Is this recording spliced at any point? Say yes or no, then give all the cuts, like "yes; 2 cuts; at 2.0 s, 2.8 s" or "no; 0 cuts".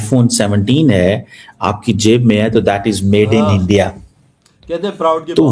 no; 0 cuts